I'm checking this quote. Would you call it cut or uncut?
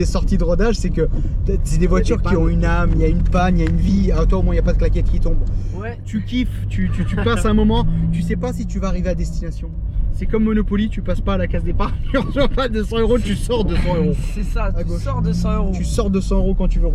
uncut